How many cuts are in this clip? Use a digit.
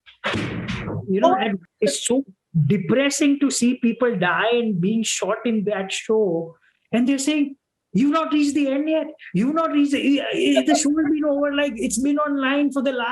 1